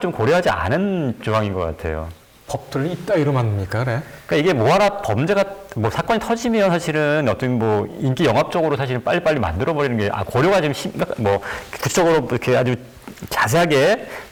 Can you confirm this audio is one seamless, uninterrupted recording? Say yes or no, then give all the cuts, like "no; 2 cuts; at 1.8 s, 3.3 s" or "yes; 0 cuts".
yes; 0 cuts